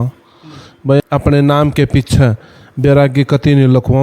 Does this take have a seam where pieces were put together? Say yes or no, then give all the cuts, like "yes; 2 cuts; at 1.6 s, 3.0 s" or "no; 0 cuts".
yes; 1 cut; at 1.0 s